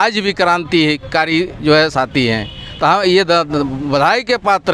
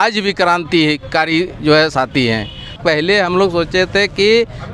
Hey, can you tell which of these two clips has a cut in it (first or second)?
second